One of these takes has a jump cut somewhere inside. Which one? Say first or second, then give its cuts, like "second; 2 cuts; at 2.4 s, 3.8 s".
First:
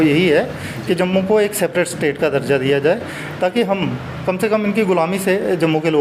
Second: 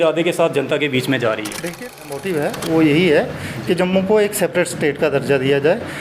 second; 1 cut; at 1.9 s